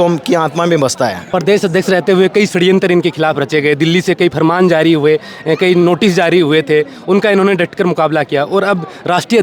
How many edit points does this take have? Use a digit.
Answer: 1